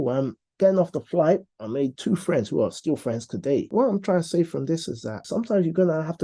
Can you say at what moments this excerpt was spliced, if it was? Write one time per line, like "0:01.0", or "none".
0:03.7
0:05.2